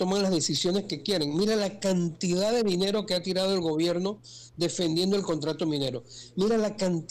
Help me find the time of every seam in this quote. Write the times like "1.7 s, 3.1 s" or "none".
none